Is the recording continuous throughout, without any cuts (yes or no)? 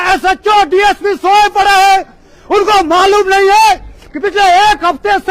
yes